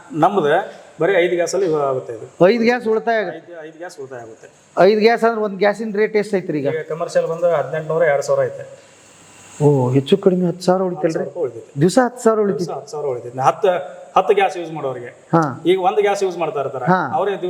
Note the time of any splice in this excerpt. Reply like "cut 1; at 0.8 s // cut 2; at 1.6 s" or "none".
none